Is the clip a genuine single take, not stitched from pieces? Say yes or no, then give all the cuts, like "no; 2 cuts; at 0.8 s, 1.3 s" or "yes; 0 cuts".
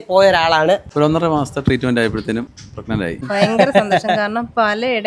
no; 2 cuts; at 0.9 s, 3.1 s